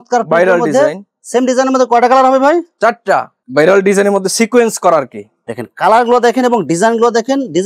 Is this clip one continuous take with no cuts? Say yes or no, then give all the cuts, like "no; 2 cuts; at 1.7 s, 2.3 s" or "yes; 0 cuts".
no; 1 cut; at 3.4 s